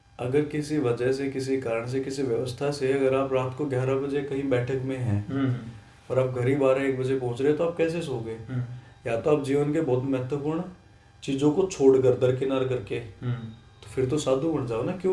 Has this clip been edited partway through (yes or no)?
no